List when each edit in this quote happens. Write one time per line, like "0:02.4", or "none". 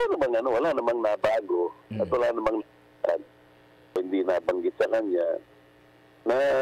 0:04.0